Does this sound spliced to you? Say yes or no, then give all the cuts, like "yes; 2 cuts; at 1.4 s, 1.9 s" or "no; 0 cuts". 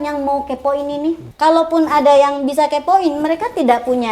yes; 1 cut; at 1.3 s